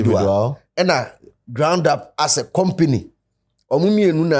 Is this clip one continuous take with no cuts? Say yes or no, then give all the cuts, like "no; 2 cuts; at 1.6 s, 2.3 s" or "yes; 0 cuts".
yes; 0 cuts